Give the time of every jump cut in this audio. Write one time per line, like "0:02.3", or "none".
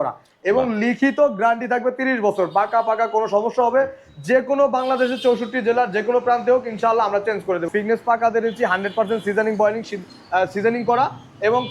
0:07.7